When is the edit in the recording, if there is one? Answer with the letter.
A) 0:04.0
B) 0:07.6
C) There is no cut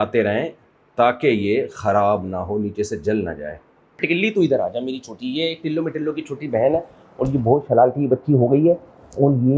A